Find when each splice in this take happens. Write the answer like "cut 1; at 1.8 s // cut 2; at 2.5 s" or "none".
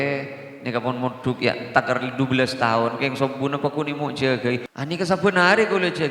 cut 1; at 4.7 s